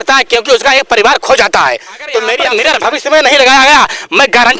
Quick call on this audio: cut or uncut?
cut